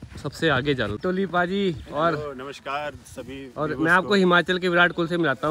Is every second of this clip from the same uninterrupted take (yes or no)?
no